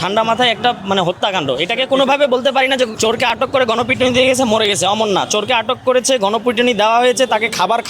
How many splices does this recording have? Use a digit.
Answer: 1